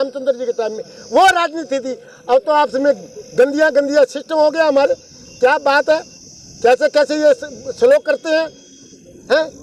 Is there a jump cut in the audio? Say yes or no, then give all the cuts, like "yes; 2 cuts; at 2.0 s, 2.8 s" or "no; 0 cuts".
no; 0 cuts